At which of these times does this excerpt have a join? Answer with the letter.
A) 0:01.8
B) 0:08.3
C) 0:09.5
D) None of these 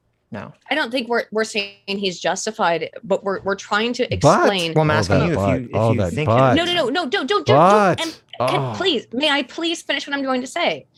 D